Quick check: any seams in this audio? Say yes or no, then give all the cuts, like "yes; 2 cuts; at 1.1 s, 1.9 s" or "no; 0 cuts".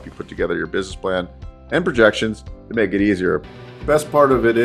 yes; 1 cut; at 3.4 s